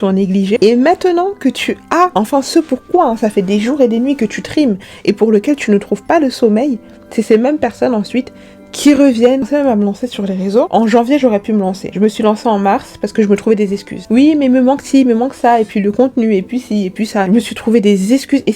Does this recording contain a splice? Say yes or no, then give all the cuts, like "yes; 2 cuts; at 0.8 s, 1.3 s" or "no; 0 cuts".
yes; 1 cut; at 9.5 s